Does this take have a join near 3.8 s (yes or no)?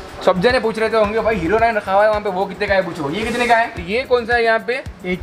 yes